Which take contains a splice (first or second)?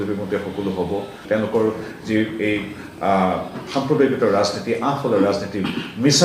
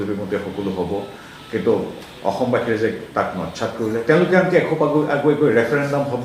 first